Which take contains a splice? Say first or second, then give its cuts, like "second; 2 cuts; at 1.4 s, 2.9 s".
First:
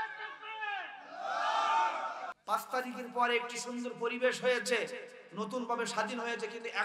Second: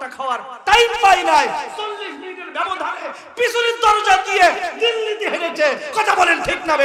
first; 1 cut; at 2.3 s